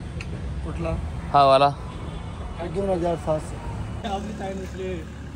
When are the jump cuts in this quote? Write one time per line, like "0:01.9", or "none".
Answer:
0:04.0